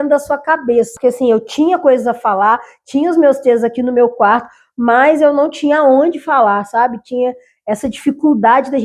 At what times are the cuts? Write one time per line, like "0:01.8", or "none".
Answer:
0:00.9